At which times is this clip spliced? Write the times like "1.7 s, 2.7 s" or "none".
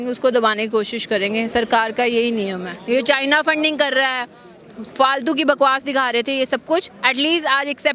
2.7 s